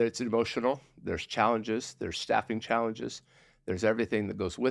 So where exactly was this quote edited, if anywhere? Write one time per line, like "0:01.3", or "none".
none